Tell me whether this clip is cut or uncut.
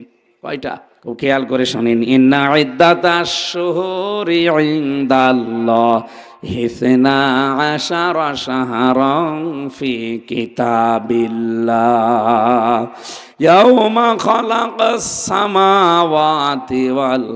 cut